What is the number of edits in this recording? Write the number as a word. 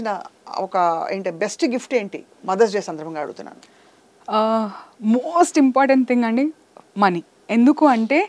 one